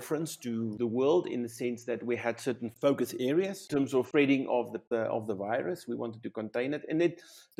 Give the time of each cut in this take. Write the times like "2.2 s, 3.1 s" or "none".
0.8 s, 2.7 s, 4.0 s, 4.8 s